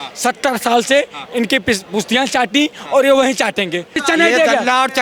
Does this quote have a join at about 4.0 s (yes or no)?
yes